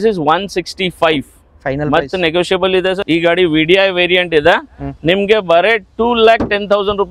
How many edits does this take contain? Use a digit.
1